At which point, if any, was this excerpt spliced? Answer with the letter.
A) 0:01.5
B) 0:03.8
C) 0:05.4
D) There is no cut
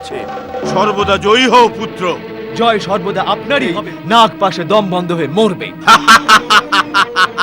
B